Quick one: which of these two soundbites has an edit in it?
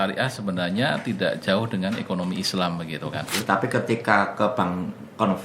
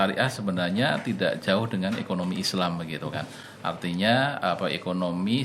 first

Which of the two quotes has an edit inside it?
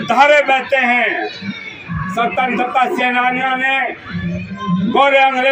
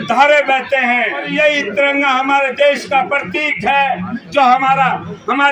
second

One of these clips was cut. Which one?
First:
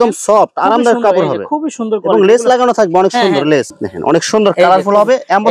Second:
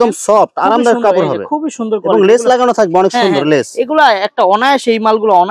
first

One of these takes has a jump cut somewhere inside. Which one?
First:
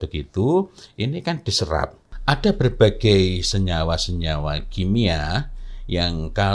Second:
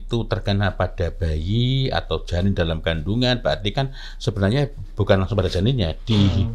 first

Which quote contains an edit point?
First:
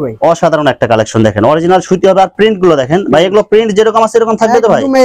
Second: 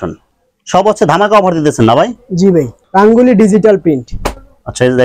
second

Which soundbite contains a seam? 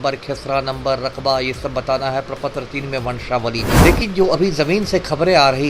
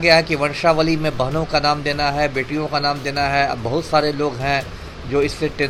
first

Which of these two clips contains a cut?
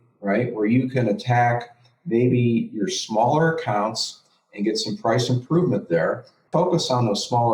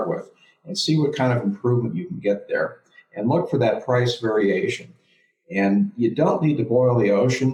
first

